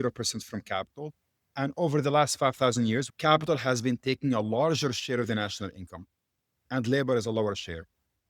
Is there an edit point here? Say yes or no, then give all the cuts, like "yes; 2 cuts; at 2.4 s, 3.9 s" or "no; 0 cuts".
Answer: yes; 1 cut; at 3.1 s